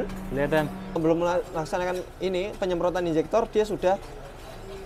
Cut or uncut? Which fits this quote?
cut